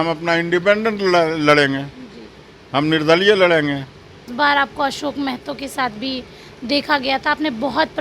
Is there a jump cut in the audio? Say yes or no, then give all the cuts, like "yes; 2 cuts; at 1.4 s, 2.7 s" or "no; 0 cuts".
yes; 1 cut; at 4.3 s